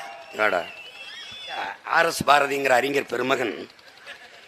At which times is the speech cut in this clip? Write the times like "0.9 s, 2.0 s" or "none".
1.7 s

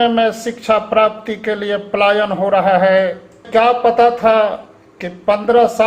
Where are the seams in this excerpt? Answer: 3.5 s

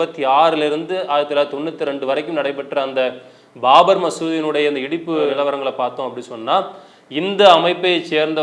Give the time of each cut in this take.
none

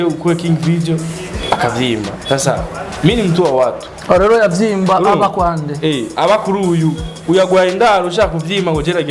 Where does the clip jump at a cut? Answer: none

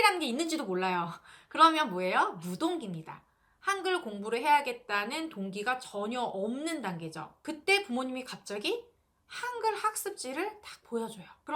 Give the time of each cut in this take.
none

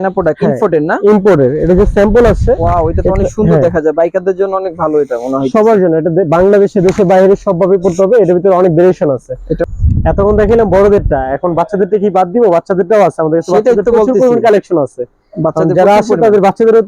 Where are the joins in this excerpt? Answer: 9.6 s

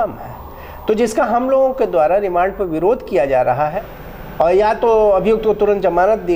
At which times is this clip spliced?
3.7 s

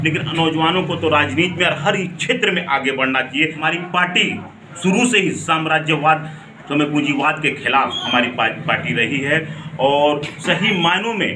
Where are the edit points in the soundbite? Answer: 3.6 s

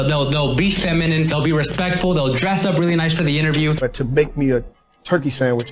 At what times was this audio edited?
3.8 s

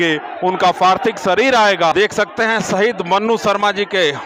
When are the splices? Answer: 1.9 s

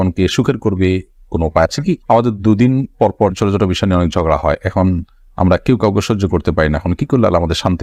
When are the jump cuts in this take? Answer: none

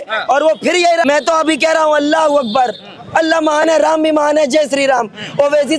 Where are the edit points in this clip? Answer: 1.0 s

